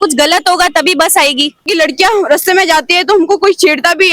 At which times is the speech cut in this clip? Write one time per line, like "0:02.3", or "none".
0:01.7